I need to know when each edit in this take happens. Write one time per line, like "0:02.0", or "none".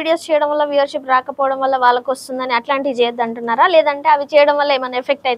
none